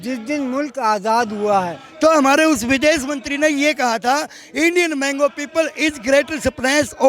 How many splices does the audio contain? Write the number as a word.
one